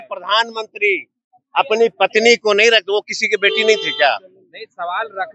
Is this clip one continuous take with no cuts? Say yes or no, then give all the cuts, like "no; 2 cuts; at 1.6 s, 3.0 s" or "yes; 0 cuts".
yes; 0 cuts